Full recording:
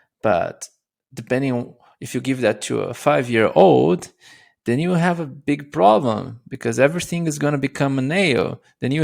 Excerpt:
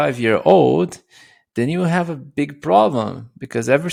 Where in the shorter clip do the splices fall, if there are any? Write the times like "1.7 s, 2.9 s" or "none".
none